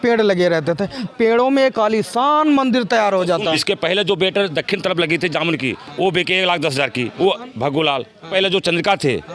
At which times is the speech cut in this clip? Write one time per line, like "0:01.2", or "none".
0:01.1
0:03.6
0:07.1
0:08.3